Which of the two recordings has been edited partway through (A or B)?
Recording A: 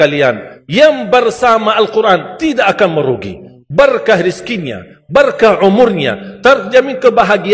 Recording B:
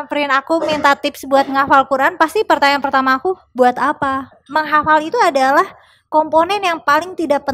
B